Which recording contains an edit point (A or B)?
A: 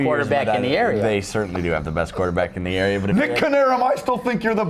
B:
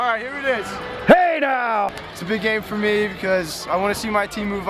B